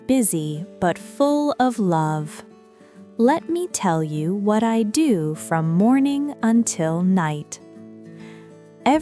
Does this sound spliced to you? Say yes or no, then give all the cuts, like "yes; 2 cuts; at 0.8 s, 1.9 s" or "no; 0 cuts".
no; 0 cuts